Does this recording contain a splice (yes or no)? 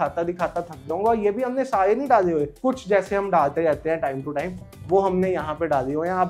no